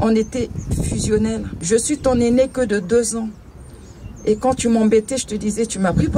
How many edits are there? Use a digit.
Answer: 1